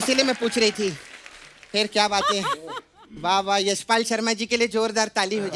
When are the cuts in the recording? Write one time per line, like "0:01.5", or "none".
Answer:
none